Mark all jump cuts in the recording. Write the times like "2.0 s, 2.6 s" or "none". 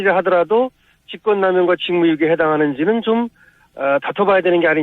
1.5 s